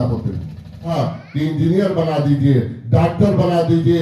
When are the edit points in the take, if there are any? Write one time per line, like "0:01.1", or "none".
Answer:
0:00.9